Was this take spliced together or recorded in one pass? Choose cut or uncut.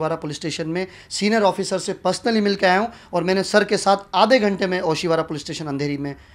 uncut